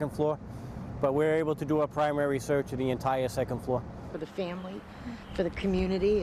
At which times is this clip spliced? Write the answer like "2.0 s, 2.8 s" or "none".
4.1 s